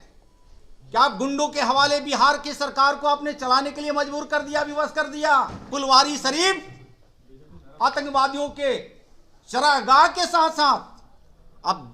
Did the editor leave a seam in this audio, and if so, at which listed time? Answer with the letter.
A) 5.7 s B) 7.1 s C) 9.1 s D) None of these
A